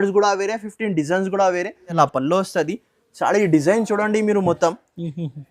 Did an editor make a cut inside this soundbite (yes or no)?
yes